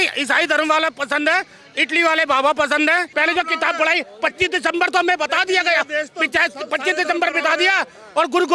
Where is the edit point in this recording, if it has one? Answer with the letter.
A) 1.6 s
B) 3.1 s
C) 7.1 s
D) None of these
B